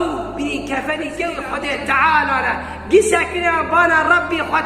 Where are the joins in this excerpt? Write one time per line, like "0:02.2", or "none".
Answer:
0:01.5